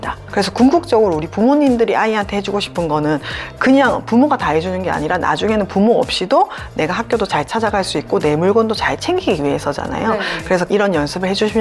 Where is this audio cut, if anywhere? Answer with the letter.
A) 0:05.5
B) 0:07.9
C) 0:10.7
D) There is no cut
C